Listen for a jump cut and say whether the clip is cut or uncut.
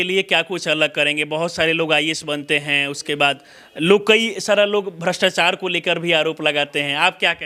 uncut